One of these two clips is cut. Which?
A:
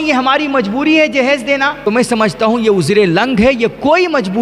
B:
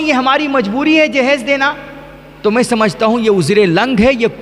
A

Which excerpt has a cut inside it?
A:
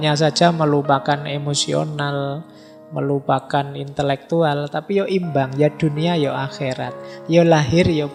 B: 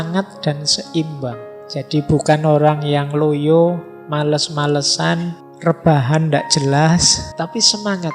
B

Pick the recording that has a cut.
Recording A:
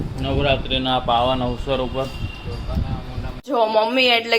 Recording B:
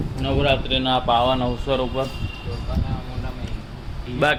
A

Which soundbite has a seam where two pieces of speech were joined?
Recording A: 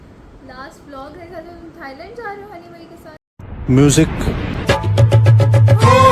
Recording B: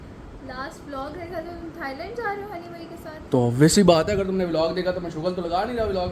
B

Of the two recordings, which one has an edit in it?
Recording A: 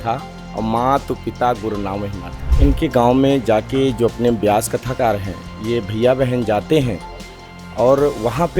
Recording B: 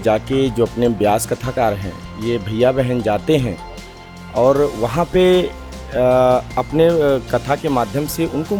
A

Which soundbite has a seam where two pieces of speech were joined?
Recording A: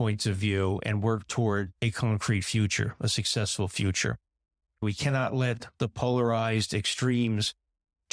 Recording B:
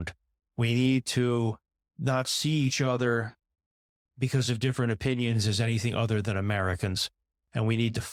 A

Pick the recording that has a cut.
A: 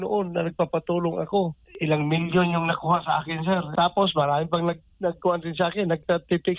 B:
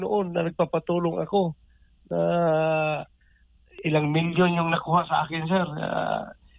A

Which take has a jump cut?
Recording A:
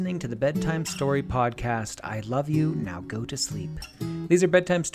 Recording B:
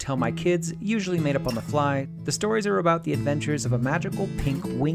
B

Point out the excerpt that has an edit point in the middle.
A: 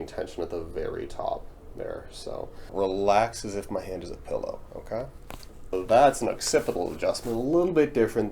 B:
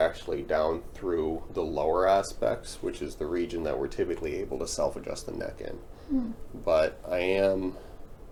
A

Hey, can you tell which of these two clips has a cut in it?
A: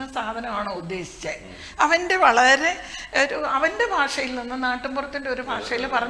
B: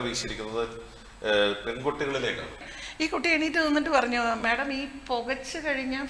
B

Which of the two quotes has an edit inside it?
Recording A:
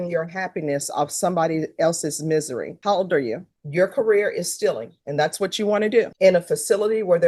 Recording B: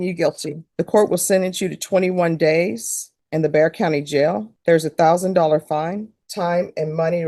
A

